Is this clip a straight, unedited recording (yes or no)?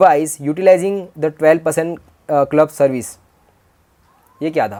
yes